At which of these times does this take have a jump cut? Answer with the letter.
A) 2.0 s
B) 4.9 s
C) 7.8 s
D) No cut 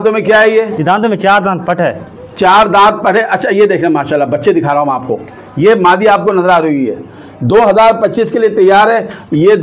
D